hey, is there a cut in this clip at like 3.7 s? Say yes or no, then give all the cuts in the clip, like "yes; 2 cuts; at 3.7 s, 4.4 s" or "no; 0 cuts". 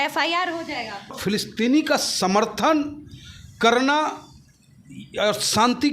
no; 1 cut; at 1.2 s